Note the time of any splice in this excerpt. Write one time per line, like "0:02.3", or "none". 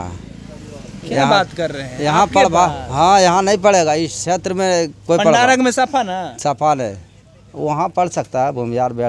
none